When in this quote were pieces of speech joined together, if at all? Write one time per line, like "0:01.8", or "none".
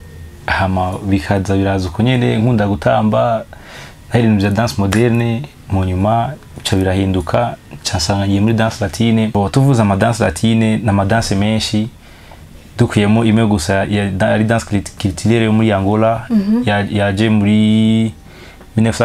0:09.3